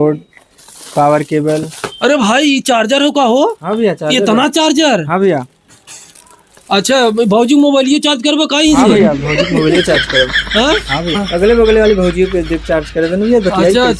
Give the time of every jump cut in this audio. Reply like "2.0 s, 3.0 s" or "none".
11.2 s